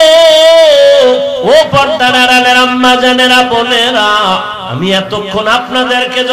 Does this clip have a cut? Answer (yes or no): yes